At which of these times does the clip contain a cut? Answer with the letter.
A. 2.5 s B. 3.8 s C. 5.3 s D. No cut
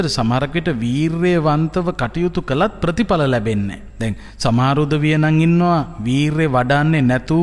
B